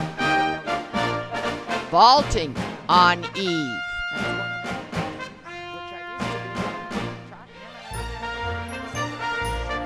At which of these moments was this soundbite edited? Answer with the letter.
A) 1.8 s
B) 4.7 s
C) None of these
C